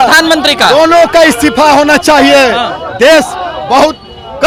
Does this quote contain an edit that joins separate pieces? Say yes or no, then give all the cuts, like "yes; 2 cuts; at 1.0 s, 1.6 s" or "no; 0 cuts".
no; 0 cuts